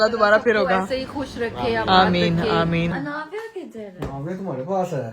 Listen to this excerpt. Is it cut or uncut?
cut